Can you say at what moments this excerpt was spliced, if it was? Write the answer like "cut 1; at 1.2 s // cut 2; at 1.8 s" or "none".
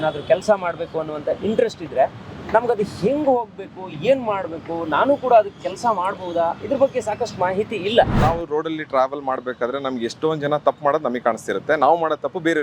cut 1; at 8.1 s